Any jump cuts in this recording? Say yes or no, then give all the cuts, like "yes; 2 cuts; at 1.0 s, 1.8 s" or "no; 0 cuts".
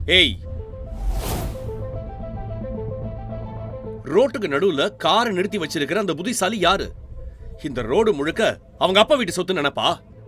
no; 0 cuts